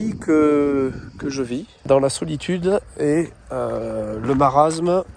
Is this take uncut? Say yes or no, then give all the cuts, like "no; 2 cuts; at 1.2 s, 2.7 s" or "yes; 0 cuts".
no; 1 cut; at 1.7 s